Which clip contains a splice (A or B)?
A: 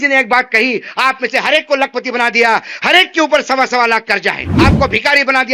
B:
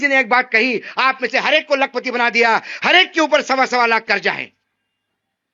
A